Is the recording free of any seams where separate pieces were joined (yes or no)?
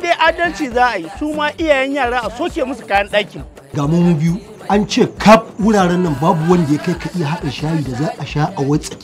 yes